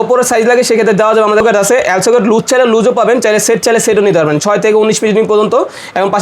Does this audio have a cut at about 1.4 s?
yes; 1 cut; at 1.4 s

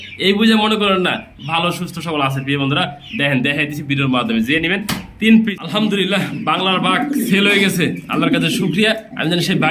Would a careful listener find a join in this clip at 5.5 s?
yes; 1 cut; at 5.5 s

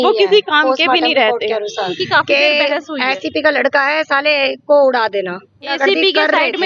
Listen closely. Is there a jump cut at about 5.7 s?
yes; 2 cuts; at 2.0 s, 5.7 s

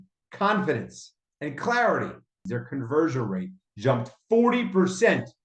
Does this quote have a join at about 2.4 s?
yes; 1 cut; at 2.4 s

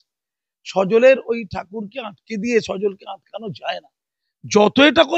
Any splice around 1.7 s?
no; 0 cuts

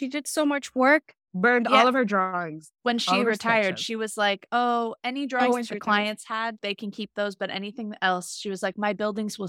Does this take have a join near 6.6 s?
yes; 1 cut; at 6.6 s

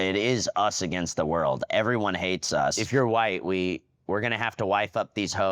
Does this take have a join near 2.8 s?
yes; 1 cut; at 2.8 s

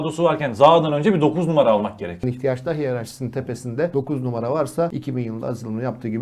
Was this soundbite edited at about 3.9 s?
yes; 3 cuts; at 2.3 s, 3.9 s, 4.9 s

